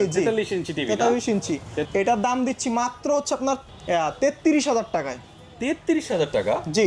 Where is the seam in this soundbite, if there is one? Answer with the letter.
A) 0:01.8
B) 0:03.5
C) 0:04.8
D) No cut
A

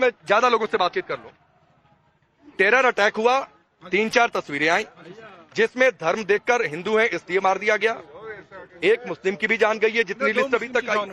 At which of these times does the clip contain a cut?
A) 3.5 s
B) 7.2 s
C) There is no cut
B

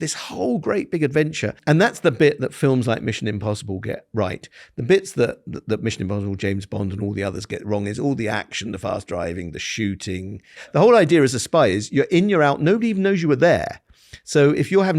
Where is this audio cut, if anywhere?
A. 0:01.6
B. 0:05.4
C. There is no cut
A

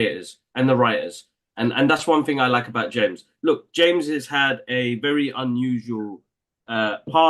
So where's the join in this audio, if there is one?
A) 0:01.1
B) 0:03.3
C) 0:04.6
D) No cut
D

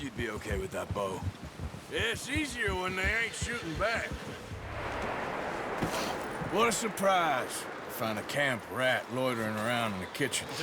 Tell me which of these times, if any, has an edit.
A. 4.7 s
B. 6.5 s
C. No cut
A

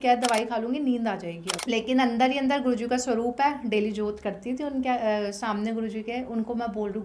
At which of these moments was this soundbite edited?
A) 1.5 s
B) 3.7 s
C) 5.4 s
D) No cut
A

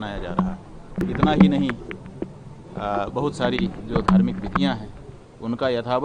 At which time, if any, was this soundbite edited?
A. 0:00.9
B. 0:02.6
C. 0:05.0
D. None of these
A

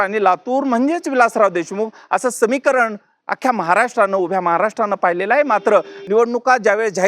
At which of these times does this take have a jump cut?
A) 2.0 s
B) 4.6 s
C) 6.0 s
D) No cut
C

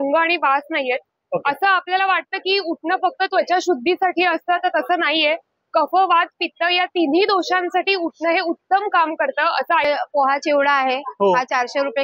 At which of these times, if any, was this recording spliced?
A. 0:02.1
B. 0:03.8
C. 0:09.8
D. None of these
C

